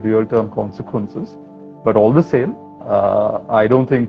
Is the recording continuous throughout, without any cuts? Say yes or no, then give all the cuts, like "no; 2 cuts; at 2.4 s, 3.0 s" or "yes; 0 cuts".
yes; 0 cuts